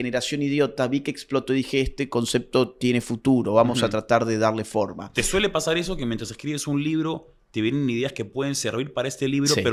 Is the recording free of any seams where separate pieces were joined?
yes; 0 cuts

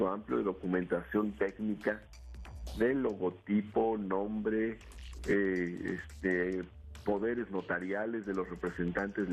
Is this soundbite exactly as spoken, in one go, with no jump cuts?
no; 1 cut; at 2.3 s

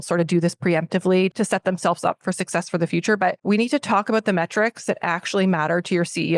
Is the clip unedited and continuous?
no; 2 cuts; at 1.3 s, 3.4 s

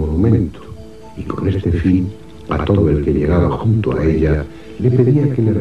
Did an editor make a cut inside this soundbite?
no; 0 cuts

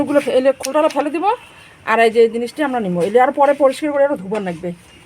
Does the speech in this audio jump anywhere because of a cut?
no; 0 cuts

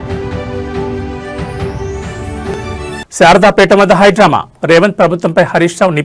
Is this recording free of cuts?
yes; 0 cuts

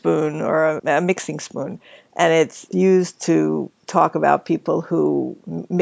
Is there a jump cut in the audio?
yes; 1 cut; at 2.6 s

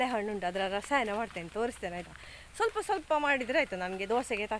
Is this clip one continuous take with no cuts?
yes; 0 cuts

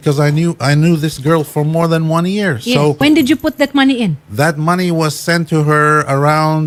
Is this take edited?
no; 0 cuts

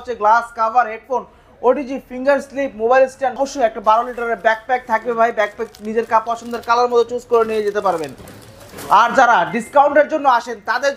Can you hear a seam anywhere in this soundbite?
yes; 1 cut; at 3.4 s

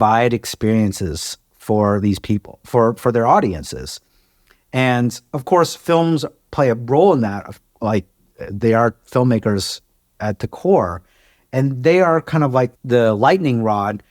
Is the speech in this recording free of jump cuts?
no; 1 cut; at 12.8 s

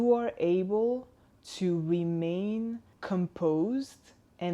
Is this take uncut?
no; 1 cut; at 2.9 s

